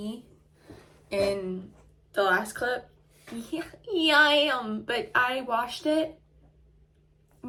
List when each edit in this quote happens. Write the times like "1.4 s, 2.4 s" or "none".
none